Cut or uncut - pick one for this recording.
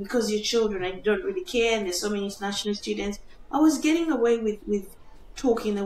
uncut